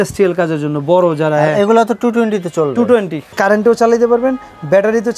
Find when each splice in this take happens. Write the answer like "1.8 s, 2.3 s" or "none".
3.3 s